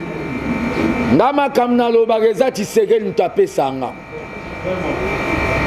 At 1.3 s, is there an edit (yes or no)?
no